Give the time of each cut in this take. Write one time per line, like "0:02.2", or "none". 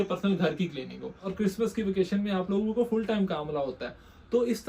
0:01.3

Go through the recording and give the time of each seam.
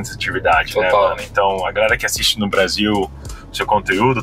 none

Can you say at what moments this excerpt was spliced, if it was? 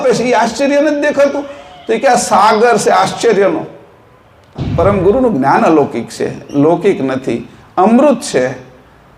0:04.6

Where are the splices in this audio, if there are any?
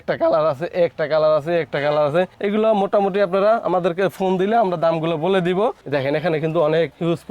0:05.8

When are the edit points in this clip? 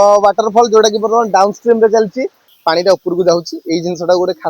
0:02.4

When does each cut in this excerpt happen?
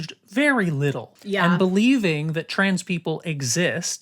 0:01.1

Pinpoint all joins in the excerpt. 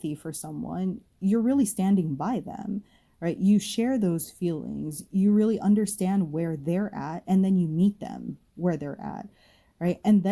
none

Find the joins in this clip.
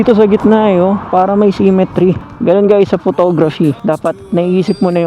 0:02.3
0:03.8

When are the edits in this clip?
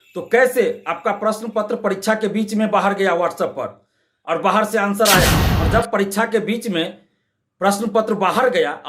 0:05.5

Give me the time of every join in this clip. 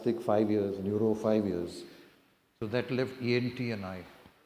none

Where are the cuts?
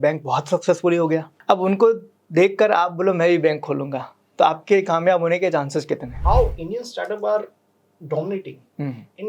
0:01.3
0:06.1

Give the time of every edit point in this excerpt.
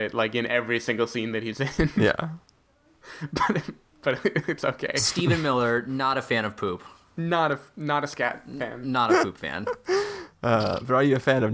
none

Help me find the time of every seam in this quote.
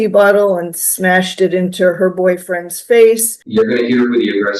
0:03.3

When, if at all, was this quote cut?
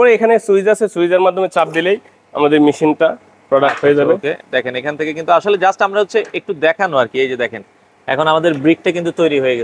none

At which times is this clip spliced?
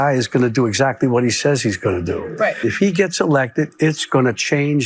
0:02.6

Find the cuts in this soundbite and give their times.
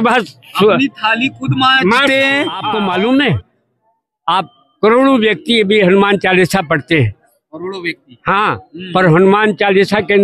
0:02.6

